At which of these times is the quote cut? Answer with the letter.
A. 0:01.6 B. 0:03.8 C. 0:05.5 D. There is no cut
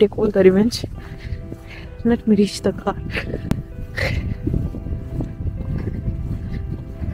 D